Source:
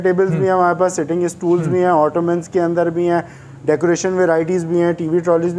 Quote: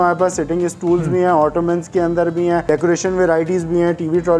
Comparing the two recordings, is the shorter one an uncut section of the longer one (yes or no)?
no